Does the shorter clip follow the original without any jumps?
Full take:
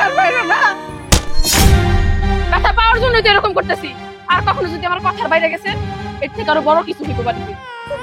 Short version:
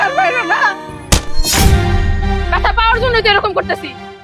yes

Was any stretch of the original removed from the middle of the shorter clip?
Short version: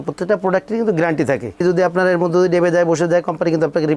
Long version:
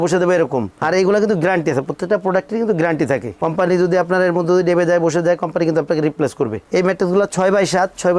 yes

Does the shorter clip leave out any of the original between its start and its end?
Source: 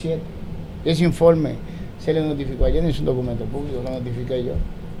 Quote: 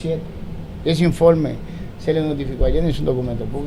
no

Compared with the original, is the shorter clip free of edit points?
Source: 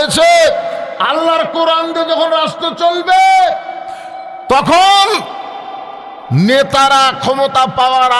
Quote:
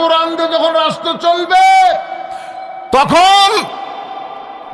yes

